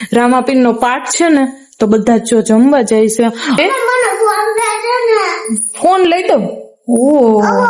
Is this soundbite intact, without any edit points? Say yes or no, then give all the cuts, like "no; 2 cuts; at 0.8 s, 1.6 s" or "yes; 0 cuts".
no; 1 cut; at 3.6 s